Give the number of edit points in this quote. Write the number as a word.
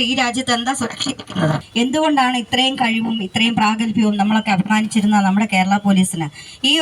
one